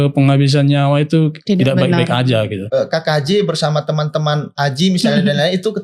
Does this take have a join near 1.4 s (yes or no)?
yes